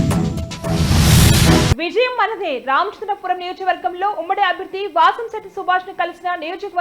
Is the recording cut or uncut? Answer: cut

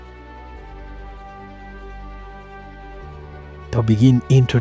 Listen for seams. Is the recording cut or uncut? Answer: uncut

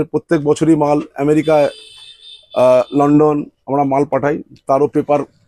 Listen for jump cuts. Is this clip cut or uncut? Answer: uncut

